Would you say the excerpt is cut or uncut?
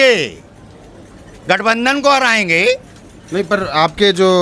uncut